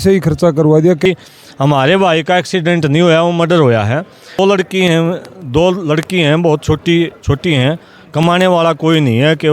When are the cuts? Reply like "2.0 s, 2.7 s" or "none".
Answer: 1.1 s, 4.4 s